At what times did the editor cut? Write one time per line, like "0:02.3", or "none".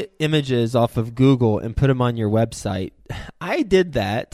none